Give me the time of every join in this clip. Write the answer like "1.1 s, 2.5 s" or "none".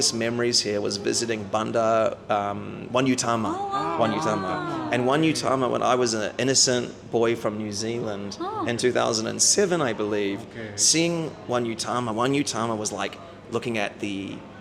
none